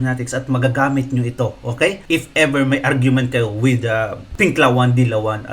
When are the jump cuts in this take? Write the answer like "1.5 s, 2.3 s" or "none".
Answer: 2.0 s, 4.3 s